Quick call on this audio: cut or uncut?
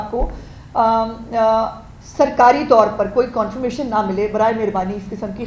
uncut